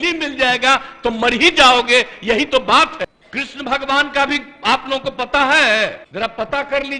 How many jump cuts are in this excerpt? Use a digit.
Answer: 2